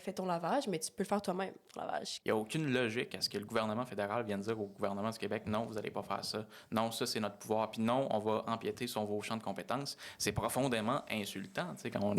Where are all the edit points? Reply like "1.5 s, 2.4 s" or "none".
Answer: 2.1 s